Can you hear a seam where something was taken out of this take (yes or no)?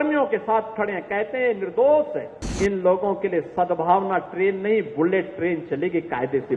yes